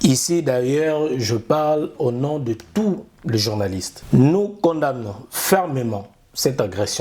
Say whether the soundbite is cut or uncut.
cut